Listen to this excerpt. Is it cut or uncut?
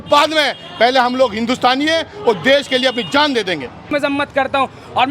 cut